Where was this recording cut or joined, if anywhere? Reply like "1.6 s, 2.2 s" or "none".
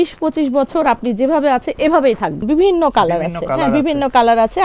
2.4 s